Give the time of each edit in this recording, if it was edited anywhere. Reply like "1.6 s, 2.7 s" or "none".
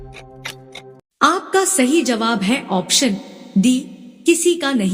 1.1 s